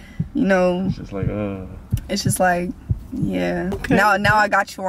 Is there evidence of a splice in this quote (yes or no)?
yes